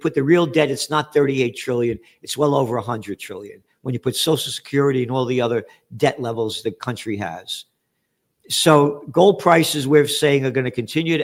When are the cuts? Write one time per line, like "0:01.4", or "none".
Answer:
none